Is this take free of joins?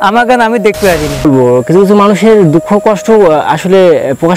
no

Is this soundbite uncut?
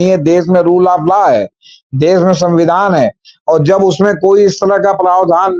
yes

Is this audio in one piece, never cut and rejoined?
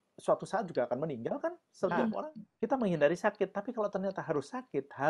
no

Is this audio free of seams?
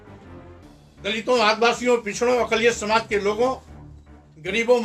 no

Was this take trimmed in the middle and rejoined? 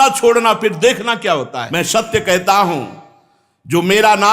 yes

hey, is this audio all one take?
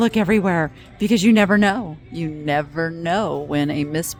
yes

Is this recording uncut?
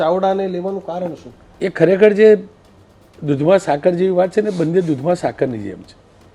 no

